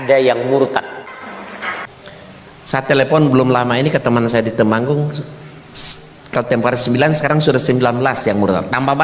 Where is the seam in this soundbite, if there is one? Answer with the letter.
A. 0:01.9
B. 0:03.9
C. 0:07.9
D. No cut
A